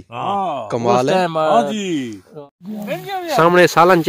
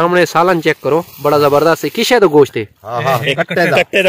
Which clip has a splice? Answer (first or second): first